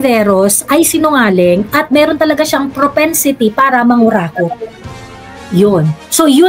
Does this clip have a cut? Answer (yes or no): no